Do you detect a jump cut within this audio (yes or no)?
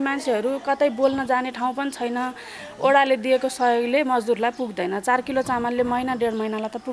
no